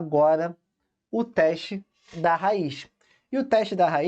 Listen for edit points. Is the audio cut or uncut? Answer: uncut